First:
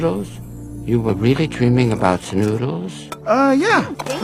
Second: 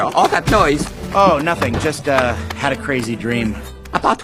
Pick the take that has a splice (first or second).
second